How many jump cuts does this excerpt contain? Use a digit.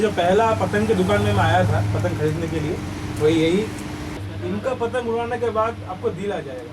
1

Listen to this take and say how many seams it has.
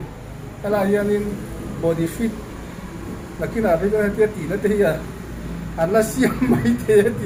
0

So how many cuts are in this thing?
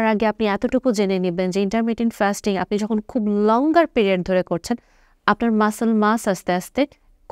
0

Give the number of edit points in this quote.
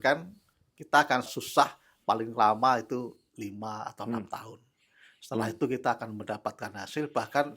1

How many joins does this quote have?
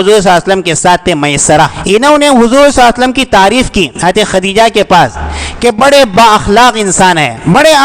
1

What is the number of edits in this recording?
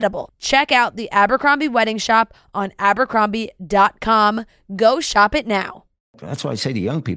1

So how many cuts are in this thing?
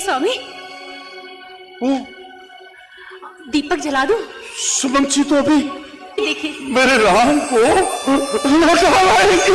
1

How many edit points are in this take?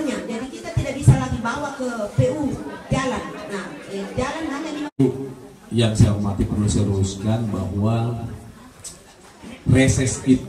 1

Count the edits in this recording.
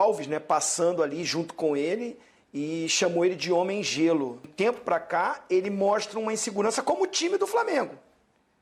1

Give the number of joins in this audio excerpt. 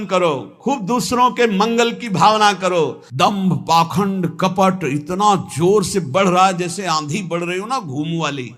1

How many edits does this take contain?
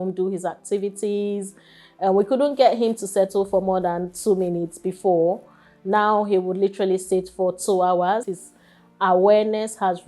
1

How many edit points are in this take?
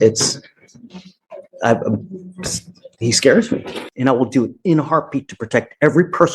1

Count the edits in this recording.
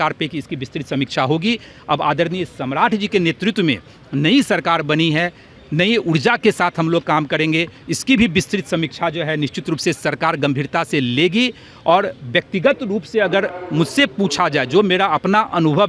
0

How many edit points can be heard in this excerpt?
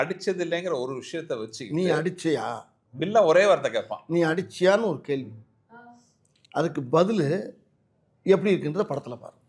0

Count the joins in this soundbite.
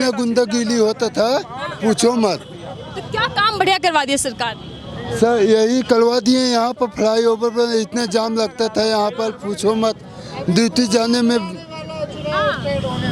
0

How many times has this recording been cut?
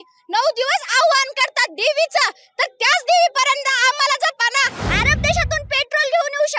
1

